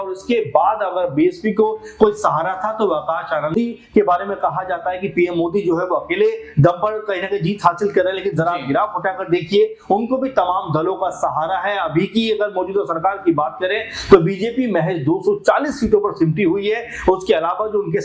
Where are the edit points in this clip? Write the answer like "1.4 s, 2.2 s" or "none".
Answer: 3.5 s